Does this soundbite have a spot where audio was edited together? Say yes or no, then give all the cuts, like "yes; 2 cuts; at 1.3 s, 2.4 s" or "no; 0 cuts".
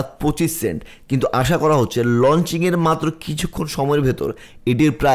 no; 0 cuts